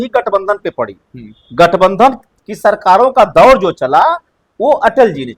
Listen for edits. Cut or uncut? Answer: uncut